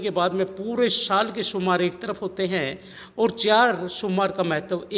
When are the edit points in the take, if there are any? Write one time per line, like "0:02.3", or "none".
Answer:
none